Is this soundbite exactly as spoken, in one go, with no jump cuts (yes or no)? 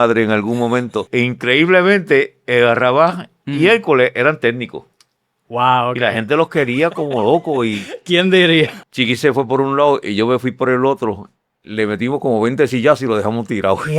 no